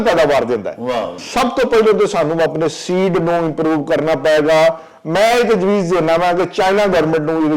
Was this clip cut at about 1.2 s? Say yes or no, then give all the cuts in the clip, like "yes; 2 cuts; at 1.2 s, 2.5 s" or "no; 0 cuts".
yes; 1 cut; at 1.2 s